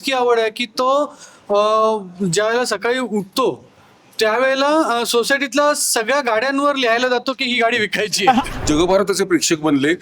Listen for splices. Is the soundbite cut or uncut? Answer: cut